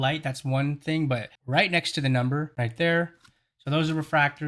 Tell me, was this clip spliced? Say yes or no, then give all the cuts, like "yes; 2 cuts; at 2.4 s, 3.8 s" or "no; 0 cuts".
yes; 2 cuts; at 1.3 s, 2.5 s